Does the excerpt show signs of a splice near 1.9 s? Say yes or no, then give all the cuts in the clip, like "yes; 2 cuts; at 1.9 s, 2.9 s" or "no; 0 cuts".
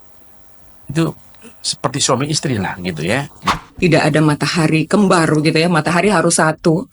no; 1 cut; at 3.4 s